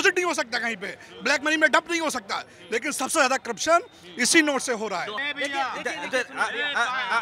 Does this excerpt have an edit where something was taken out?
yes; 1 cut; at 5.1 s

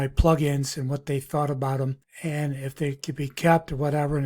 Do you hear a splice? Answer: yes; 1 cut; at 2.1 s

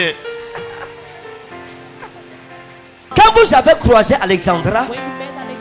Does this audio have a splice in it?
yes; 1 cut; at 3.1 s

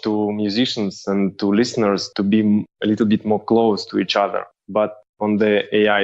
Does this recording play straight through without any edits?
yes; 0 cuts

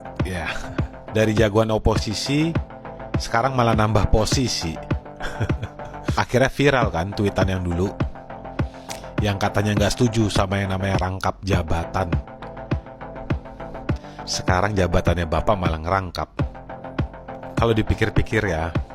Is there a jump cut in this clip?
no; 0 cuts

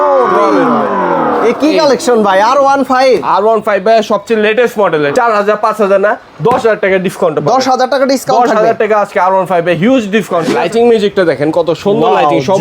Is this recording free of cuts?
no; 2 cuts; at 5.1 s, 10.5 s

